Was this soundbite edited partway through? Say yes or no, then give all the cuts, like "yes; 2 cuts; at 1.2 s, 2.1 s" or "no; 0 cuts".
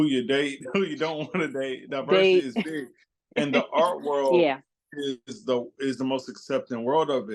no; 0 cuts